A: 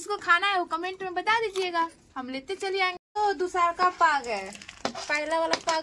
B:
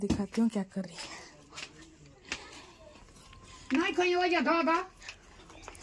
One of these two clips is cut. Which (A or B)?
A